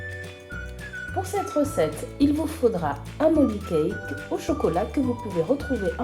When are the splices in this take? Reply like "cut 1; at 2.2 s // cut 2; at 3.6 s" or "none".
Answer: cut 1; at 1.1 s